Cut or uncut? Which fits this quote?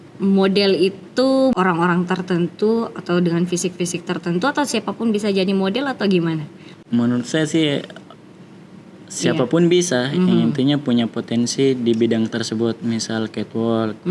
cut